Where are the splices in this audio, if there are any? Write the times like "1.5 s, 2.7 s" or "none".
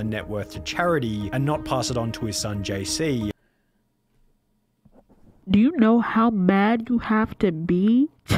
5.4 s